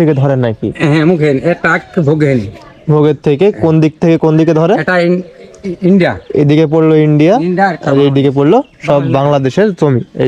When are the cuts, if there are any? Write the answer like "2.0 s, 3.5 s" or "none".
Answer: none